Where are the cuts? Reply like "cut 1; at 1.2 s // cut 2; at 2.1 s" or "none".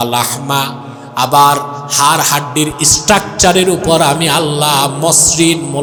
none

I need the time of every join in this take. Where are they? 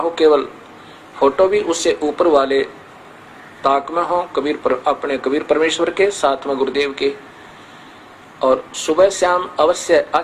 none

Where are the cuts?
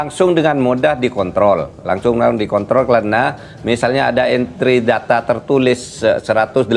none

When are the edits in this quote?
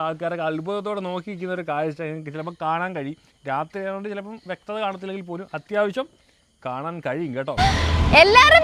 cut 1; at 7.6 s

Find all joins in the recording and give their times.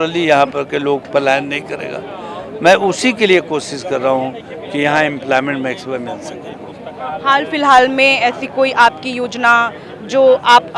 none

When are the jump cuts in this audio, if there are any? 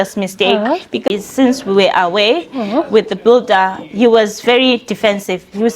cut 1; at 1.1 s

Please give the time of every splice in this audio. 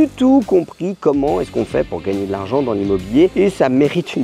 cut 1; at 3.3 s

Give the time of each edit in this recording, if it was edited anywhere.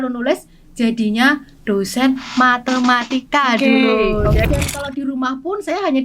cut 1; at 4.4 s

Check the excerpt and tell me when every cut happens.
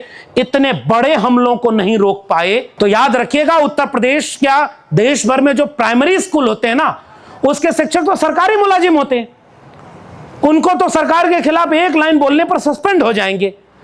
cut 1; at 2.7 s

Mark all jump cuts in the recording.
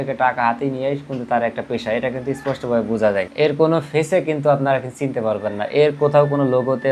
cut 1; at 3.3 s

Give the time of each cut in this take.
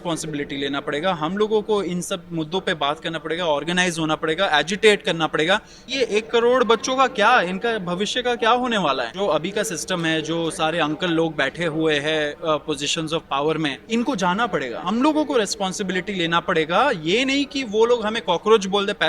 cut 1; at 5.8 s // cut 2; at 9.1 s // cut 3; at 13.8 s // cut 4; at 14.8 s

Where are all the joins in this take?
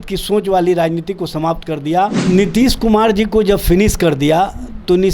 cut 1; at 2.2 s

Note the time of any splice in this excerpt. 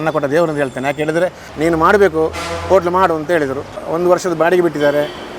cut 1; at 1.4 s // cut 2; at 3.8 s

